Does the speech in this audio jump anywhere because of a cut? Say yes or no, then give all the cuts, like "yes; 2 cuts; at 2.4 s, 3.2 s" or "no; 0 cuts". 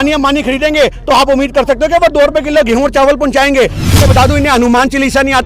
yes; 1 cut; at 4.0 s